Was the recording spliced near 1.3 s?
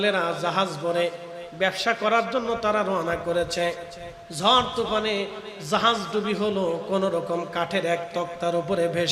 no; 0 cuts

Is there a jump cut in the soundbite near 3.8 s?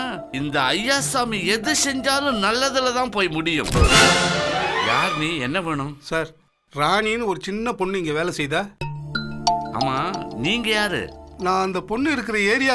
yes; 1 cut; at 3.8 s

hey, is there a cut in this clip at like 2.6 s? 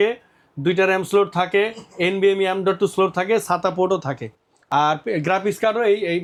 no; 0 cuts

